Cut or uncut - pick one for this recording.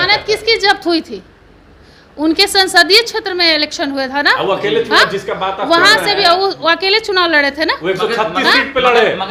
uncut